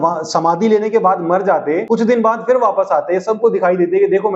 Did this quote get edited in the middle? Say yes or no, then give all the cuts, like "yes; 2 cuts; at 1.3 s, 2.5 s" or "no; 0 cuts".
yes; 1 cut; at 1.8 s